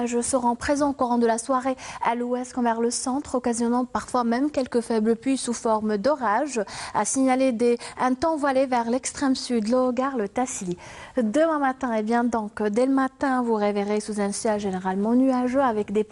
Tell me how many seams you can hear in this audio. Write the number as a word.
one